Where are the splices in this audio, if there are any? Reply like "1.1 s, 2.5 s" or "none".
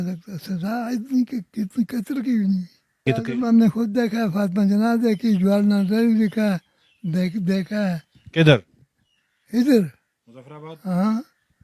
3.0 s